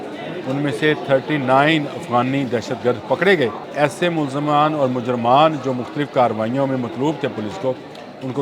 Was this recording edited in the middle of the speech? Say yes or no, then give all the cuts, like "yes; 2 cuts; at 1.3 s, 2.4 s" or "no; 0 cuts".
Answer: yes; 1 cut; at 3.6 s